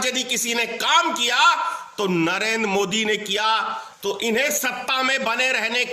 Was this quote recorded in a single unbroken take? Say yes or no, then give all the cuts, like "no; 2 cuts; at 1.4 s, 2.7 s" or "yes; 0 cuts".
no; 1 cut; at 3.8 s